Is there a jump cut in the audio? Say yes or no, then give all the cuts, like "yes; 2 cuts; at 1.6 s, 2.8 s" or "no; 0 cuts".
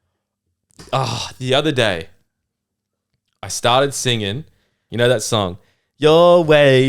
yes; 1 cut; at 4.8 s